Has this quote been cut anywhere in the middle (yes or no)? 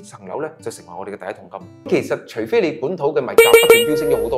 yes